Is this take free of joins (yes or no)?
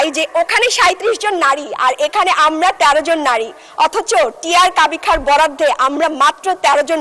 yes